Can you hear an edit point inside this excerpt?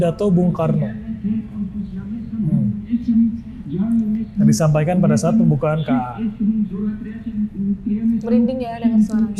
no; 0 cuts

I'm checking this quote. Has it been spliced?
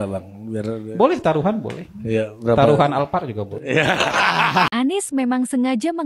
yes; 1 cut; at 4.7 s

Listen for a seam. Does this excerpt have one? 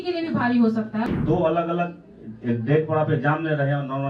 yes; 1 cut; at 1.2 s

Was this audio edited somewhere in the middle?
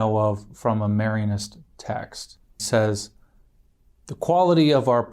yes; 1 cut; at 2.6 s

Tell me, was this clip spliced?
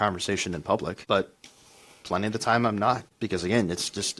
yes; 2 cuts; at 1.0 s, 3.1 s

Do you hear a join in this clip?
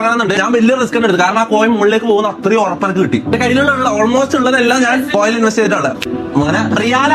yes; 1 cut; at 6.1 s

